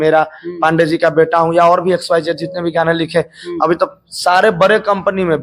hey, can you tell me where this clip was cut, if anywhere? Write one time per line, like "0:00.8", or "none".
none